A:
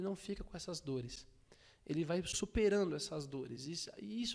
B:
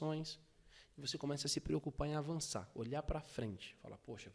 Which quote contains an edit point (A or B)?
A